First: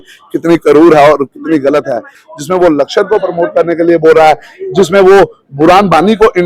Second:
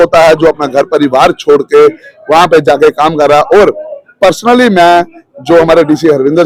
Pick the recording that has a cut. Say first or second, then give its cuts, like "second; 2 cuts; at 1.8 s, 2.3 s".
first; 1 cut; at 2.2 s